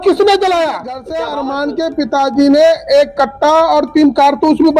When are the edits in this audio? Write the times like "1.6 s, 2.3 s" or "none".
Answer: 1.0 s